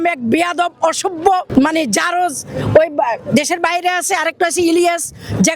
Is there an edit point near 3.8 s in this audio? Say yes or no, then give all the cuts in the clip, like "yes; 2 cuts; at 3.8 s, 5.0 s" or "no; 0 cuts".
no; 1 cut; at 1.5 s